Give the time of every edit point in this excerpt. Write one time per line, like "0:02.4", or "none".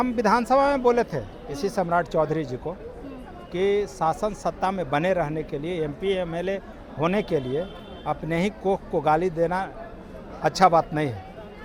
none